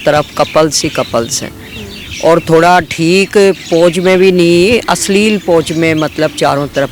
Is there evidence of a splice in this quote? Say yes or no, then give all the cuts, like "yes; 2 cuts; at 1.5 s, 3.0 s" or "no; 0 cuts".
no; 0 cuts